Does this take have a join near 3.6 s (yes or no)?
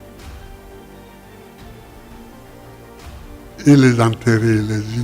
yes